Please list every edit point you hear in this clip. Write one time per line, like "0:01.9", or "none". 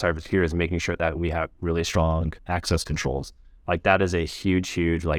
none

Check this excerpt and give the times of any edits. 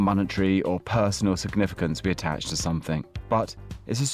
0:03.1

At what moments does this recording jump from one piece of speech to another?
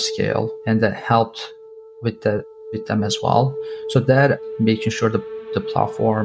0:04.5

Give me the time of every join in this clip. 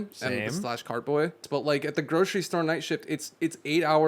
0:01.4

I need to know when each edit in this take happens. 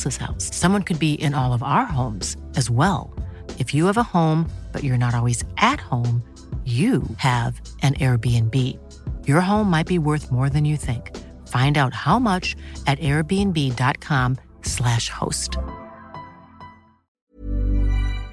0:17.2

